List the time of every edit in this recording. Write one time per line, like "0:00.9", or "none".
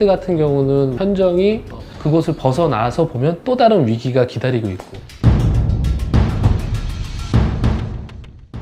none